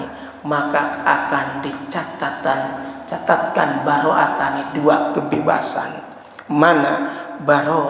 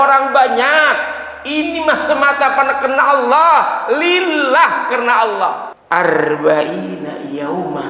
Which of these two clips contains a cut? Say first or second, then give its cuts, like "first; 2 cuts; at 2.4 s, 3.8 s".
second; 1 cut; at 5.7 s